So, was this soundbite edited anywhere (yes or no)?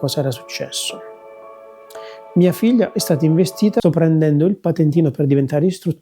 yes